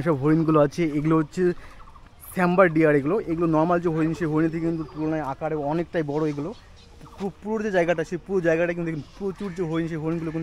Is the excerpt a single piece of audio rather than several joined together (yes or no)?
yes